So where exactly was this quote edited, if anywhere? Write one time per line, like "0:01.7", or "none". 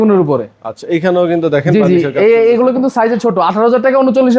none